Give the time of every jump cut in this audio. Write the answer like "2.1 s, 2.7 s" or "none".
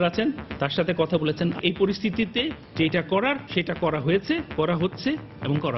1.6 s, 2.6 s, 3.4 s